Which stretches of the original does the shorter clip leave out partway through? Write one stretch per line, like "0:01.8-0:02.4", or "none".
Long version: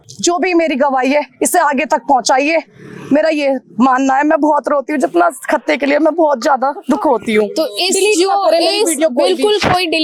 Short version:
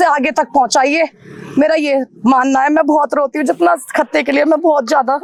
none